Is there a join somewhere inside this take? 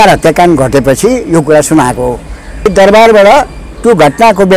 yes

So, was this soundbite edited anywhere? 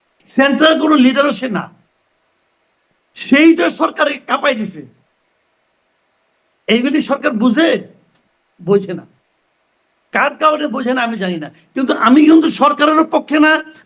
no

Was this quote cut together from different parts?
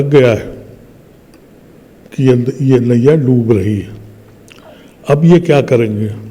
no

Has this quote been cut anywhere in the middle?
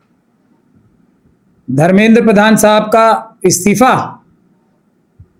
no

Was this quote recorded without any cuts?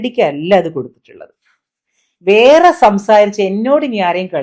yes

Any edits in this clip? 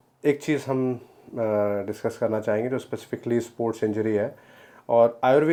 no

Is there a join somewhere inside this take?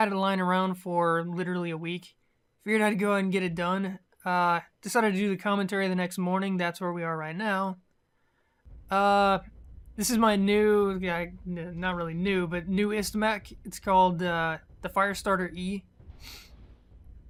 no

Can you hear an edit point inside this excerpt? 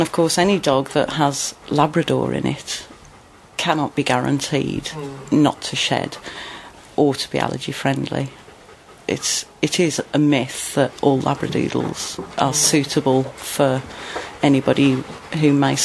yes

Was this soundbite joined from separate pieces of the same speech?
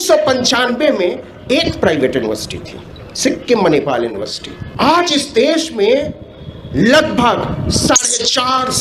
yes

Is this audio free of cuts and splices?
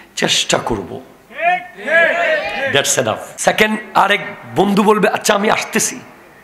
no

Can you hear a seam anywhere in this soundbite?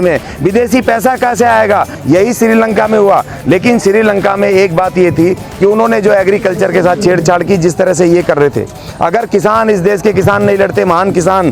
yes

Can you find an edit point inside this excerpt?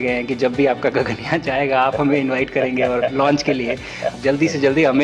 yes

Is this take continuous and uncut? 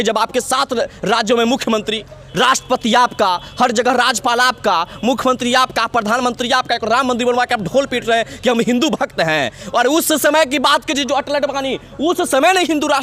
yes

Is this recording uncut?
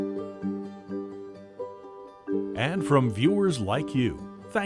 no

